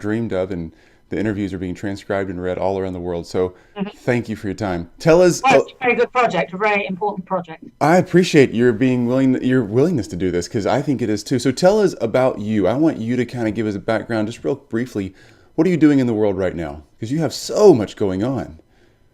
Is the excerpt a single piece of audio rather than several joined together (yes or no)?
no